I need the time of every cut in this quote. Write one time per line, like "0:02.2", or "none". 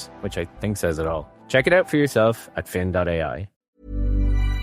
0:03.5